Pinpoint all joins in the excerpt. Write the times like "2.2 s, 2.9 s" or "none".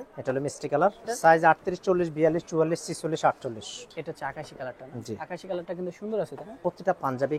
1.1 s, 3.8 s, 6.4 s